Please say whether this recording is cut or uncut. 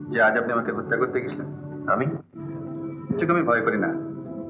uncut